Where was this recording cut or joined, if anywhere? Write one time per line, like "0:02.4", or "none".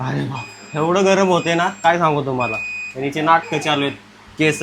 none